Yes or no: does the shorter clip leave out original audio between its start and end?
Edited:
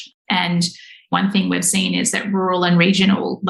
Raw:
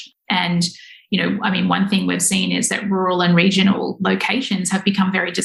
yes